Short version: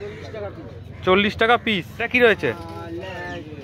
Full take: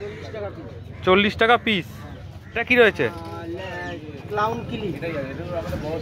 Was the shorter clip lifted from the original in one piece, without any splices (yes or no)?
no